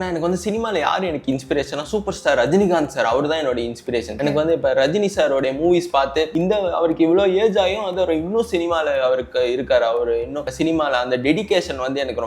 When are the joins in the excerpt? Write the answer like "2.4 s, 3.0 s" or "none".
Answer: 4.1 s, 6.3 s, 10.4 s